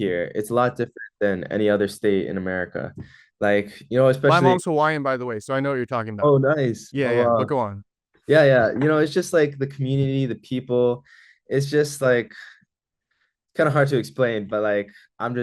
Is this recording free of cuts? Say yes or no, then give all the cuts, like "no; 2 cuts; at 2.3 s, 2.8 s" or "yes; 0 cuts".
yes; 0 cuts